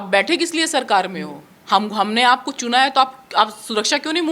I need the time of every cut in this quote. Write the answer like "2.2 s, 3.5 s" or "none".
none